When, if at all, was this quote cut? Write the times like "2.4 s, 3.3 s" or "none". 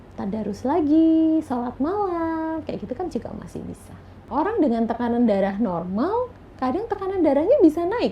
4.2 s